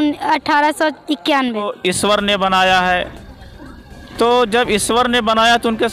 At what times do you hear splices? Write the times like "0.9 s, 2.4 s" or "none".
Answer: 1.7 s